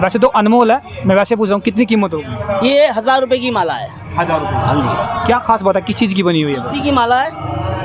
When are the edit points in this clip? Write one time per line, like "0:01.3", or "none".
none